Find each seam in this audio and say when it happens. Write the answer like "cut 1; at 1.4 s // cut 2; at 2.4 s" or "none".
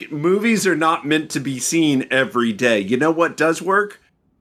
none